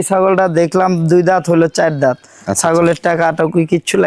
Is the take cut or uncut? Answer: uncut